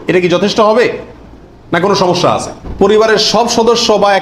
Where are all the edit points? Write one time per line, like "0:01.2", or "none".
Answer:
0:02.6